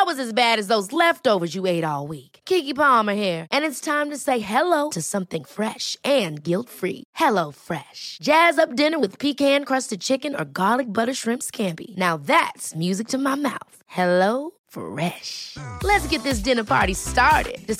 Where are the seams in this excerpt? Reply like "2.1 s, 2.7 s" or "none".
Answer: none